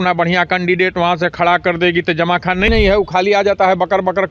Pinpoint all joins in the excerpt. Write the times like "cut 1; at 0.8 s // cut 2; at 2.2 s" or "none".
cut 1; at 2.7 s